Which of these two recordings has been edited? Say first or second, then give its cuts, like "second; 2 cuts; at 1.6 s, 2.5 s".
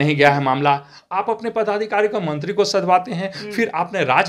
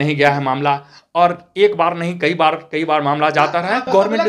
first; 1 cut; at 0.9 s